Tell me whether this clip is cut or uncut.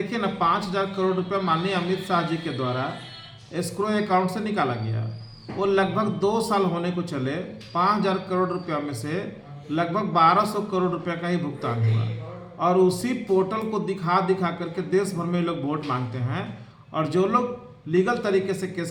uncut